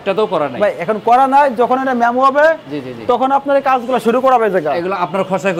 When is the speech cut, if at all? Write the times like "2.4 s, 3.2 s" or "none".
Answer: none